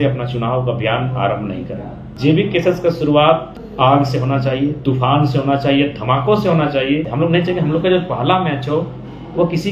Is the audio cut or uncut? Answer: cut